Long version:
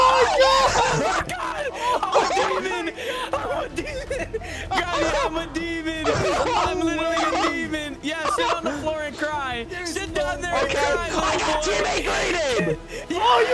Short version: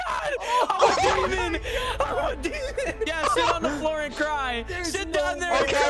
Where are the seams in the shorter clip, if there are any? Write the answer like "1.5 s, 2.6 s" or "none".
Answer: 3.1 s